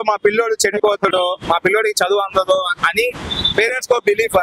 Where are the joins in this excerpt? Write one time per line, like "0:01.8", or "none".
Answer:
none

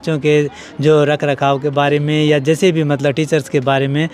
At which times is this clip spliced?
none

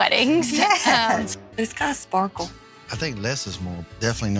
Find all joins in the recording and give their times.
0:01.4

